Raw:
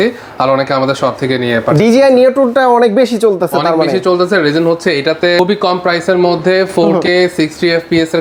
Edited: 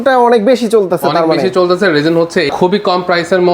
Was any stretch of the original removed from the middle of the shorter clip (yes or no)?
yes